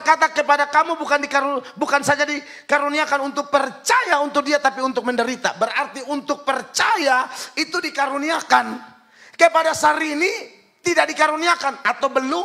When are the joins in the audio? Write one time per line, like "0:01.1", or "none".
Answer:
none